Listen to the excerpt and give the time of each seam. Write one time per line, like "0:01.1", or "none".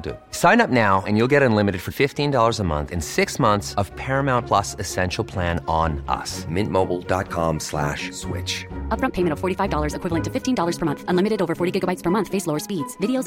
none